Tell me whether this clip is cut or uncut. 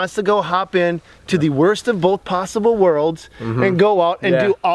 uncut